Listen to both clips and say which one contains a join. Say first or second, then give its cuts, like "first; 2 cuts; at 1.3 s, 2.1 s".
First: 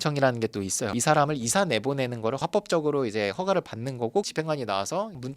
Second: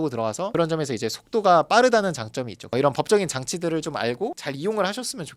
first; 2 cuts; at 0.9 s, 4.3 s